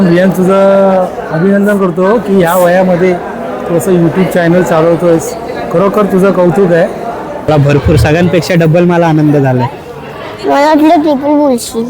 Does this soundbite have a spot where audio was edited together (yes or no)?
yes